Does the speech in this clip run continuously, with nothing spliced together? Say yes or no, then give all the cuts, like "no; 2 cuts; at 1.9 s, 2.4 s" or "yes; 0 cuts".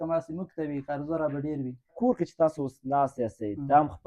no; 1 cut; at 1.9 s